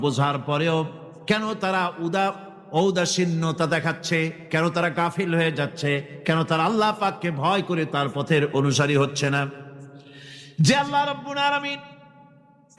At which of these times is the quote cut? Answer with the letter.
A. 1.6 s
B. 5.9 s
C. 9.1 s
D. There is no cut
D